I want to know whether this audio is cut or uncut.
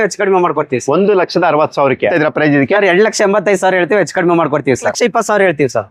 cut